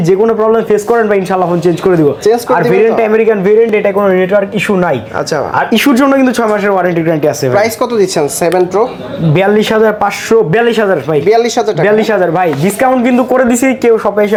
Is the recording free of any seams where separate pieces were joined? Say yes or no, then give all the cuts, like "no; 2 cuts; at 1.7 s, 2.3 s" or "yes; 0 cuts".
yes; 0 cuts